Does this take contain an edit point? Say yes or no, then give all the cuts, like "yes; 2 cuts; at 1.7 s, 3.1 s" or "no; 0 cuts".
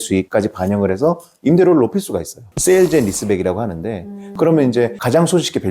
yes; 2 cuts; at 2.5 s, 4.2 s